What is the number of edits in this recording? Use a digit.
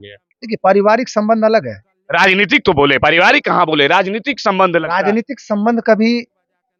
0